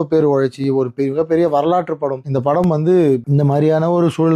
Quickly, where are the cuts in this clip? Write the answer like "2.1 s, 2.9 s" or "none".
2.2 s, 3.2 s